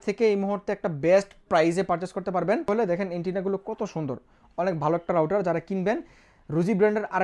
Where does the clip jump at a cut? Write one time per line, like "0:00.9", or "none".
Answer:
0:02.7